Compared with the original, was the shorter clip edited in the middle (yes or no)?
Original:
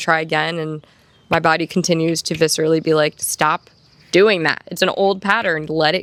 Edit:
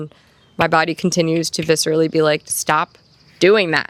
no